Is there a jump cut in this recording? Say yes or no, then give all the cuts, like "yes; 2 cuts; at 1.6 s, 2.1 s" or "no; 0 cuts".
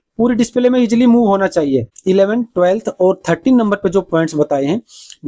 yes; 1 cut; at 1.9 s